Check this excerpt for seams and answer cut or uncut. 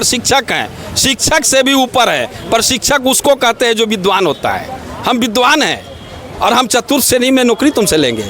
uncut